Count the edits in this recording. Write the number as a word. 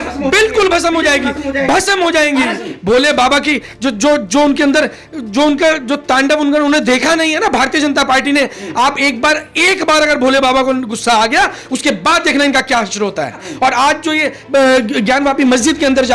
two